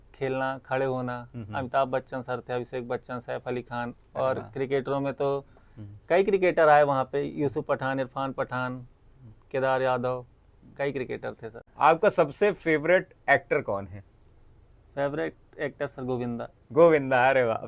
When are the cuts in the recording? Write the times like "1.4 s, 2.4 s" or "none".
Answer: 11.6 s